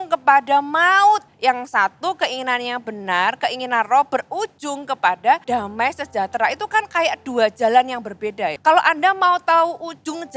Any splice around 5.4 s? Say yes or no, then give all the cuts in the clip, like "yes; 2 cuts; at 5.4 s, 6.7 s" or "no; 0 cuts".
yes; 3 cuts; at 1.3 s, 5.4 s, 8.6 s